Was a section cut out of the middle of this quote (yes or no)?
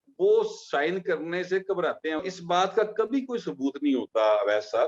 yes